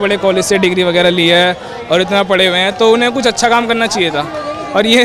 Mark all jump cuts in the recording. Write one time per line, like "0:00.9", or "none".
none